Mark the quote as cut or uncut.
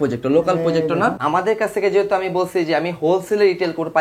cut